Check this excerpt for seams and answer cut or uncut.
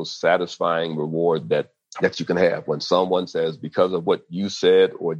cut